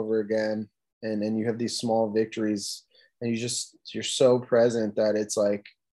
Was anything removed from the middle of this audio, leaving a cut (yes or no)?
no